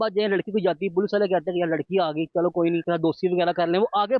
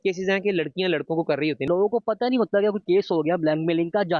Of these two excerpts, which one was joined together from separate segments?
second; 1 cut; at 1.6 s

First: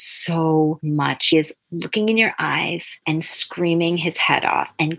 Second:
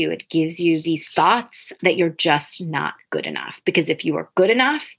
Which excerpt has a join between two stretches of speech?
first; 2 cuts; at 1.3 s, 3.0 s

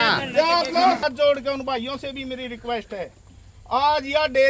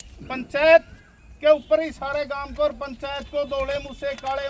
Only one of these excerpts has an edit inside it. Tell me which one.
first; 1 cut; at 1.0 s

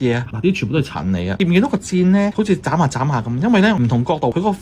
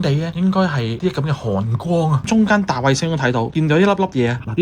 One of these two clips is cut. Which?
second; 1 cut; at 2.2 s

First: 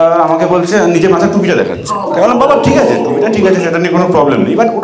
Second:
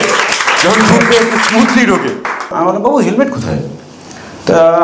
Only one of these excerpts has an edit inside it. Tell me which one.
second; 1 cut; at 2.5 s

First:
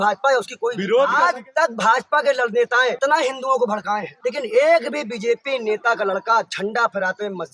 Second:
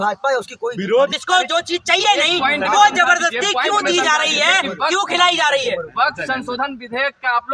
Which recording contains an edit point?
first; 3 cuts; at 1.2 s, 3.0 s, 4.1 s

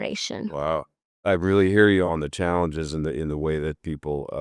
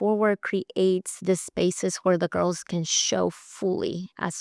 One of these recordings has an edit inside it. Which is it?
first; 2 cuts; at 1.2 s, 2.1 s

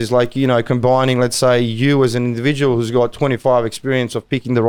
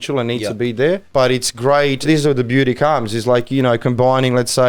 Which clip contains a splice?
second; 2 cuts; at 1.0 s, 2.0 s

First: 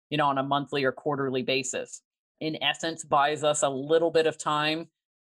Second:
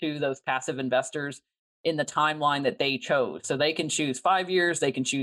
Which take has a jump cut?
first; 1 cut; at 2.4 s

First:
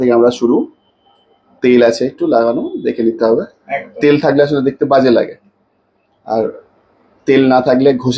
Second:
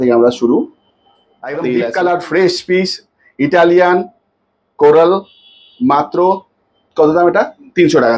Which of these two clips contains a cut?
second; 1 cut; at 1.7 s

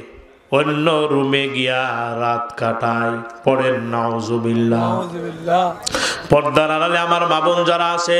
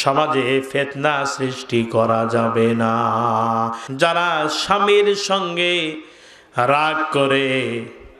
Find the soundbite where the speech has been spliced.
second; 1 cut; at 3.8 s

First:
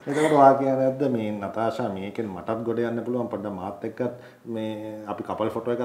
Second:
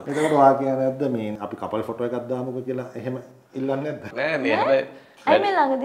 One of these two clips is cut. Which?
second; 2 cuts; at 1.4 s, 4.1 s

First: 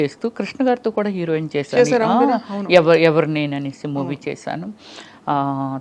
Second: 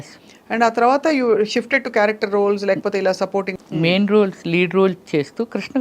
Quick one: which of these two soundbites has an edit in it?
second; 1 cut; at 3.5 s

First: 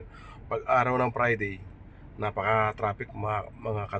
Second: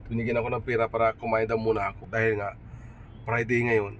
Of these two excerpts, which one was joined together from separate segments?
second; 1 cut; at 2.1 s

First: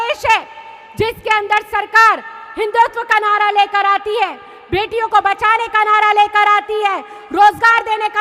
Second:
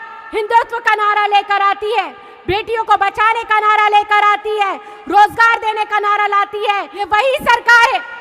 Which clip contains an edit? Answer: second; 1 cut; at 6.9 s

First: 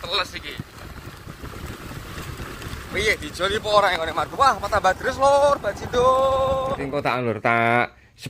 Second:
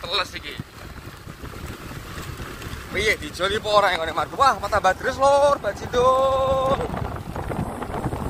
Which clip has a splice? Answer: first; 1 cut; at 6.9 s

